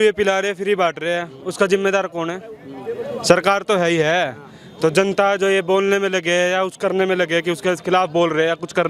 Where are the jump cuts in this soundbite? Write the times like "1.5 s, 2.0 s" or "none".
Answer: none

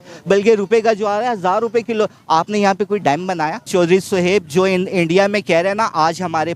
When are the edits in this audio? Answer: 3.7 s

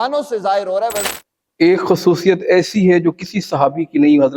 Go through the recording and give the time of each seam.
1.1 s

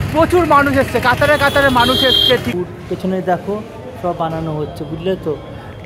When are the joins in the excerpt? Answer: 2.5 s

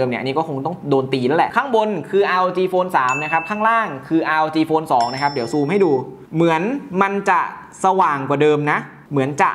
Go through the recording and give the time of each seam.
1.5 s

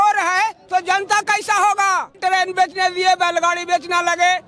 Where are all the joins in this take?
2.1 s

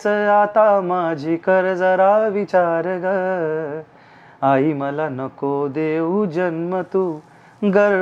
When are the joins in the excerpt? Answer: none

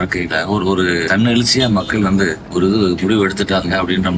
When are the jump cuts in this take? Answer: 1.1 s, 2.4 s

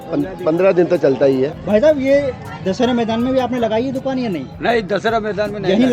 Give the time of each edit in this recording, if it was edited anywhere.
1.5 s

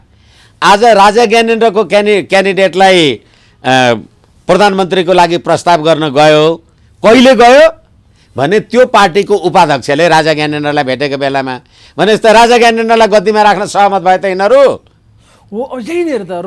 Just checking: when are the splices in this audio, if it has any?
none

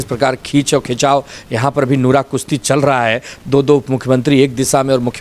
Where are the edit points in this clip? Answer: none

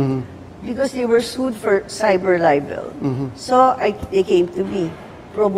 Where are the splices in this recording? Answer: none

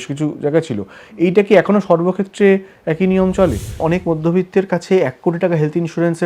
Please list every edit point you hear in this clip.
3.8 s

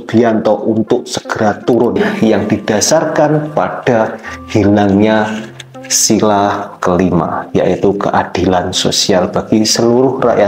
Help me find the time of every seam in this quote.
2.0 s

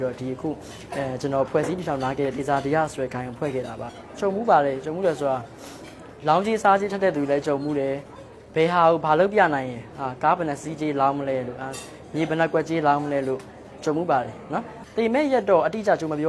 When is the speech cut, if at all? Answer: 3.9 s, 14.8 s

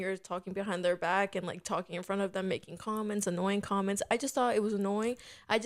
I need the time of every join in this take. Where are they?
none

